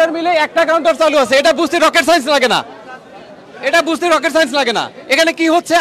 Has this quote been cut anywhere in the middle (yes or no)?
no